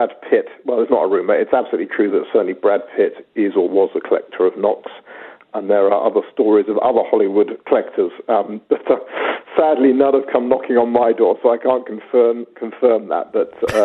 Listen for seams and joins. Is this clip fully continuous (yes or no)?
no